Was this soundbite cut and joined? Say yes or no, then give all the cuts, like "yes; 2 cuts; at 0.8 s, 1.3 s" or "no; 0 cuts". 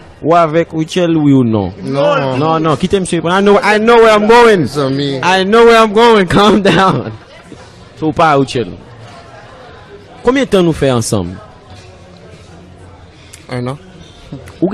yes; 1 cut; at 10.2 s